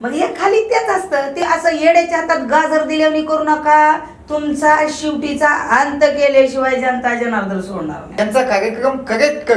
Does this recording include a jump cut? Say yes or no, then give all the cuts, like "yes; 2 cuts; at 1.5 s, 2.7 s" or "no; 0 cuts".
yes; 2 cuts; at 1.4 s, 8.0 s